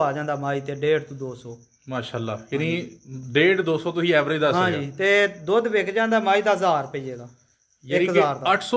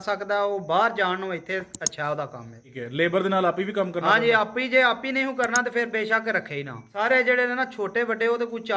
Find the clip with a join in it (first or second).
second